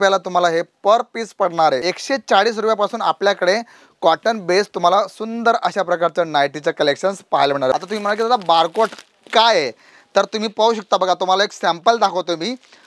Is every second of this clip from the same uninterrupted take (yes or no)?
no